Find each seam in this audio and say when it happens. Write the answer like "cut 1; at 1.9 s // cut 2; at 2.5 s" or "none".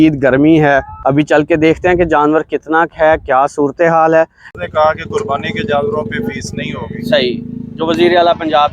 cut 1; at 0.9 s // cut 2; at 4.5 s